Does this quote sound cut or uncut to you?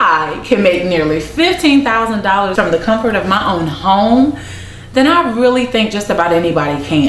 cut